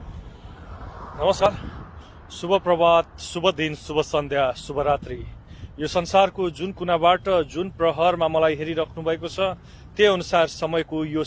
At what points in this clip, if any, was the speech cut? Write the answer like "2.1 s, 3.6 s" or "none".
1.5 s